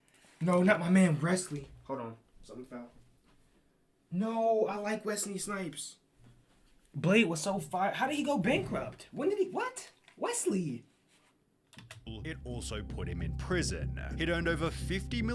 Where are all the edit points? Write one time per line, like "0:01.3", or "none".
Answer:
none